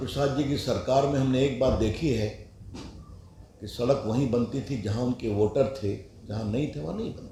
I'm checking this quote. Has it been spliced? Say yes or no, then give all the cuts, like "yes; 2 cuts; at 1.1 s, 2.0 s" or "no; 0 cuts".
no; 0 cuts